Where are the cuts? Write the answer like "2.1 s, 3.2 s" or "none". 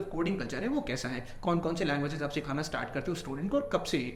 none